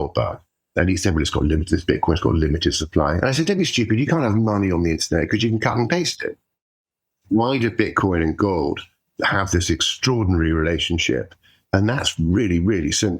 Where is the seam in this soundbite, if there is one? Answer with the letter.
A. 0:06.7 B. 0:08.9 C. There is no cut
A